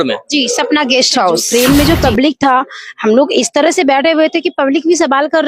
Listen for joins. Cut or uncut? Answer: cut